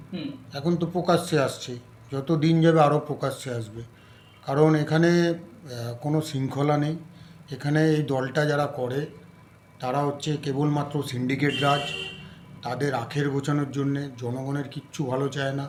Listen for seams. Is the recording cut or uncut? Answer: uncut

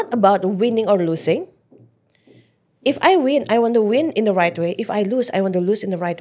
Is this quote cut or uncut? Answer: uncut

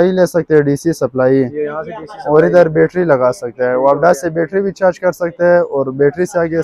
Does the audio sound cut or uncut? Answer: uncut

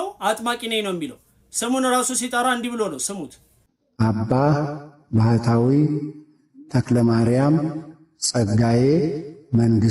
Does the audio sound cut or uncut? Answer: uncut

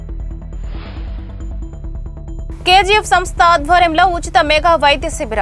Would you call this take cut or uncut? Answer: uncut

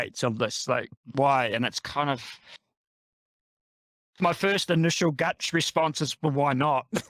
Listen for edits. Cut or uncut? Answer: uncut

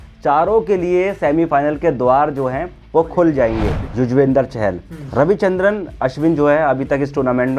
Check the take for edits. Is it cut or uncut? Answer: cut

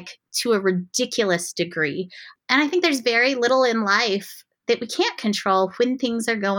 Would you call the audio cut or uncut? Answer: cut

